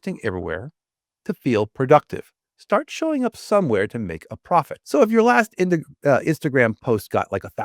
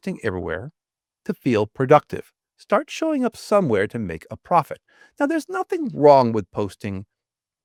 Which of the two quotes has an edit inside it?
first; 1 cut; at 4.8 s

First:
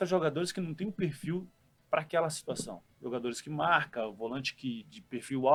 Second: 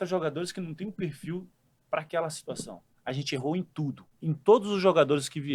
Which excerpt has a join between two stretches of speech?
second; 2 cuts; at 2.8 s, 4.1 s

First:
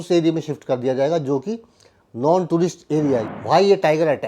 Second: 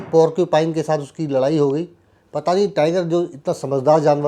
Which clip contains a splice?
first; 1 cut; at 3.2 s

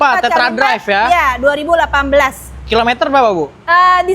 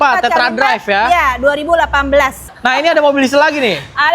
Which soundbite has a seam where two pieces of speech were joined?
second; 1 cut; at 2.5 s

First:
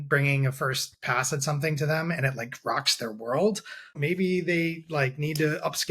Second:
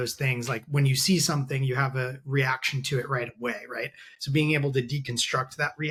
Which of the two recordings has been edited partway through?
first; 1 cut; at 4.0 s

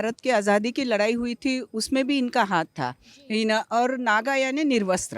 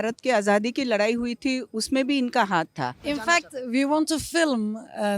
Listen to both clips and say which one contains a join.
second; 1 cut; at 3.0 s

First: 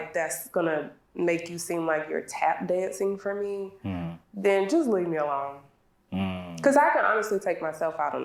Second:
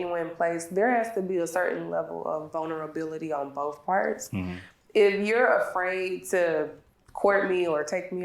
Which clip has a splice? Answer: second; 1 cut; at 7.3 s

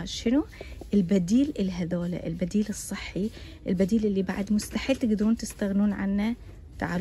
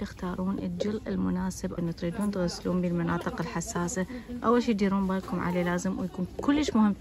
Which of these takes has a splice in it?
second; 1 cut; at 1.8 s

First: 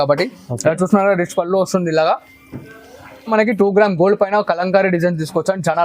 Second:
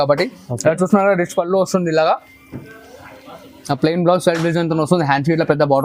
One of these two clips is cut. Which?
first; 1 cut; at 3.3 s

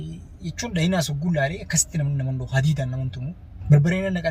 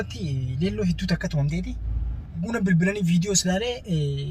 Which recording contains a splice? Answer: second; 1 cut; at 2.4 s

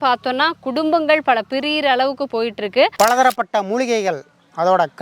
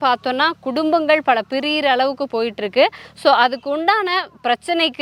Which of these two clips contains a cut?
first; 1 cut; at 2.9 s

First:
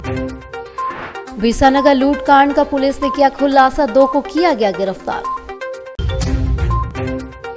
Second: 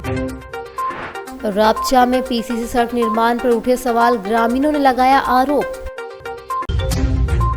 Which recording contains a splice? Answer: first; 1 cut; at 1.2 s

